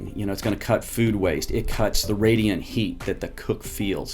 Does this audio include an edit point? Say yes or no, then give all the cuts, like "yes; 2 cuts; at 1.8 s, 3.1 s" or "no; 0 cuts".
yes; 1 cut; at 2.1 s